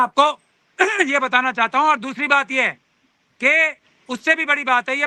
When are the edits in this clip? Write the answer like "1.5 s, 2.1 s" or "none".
none